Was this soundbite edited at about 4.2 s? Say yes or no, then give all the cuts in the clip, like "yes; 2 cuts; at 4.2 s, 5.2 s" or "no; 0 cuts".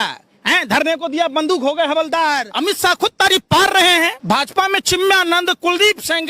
yes; 2 cuts; at 2.5 s, 4.2 s